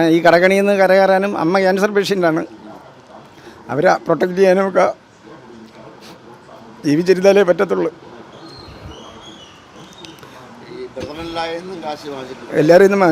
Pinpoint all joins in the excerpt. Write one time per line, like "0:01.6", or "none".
none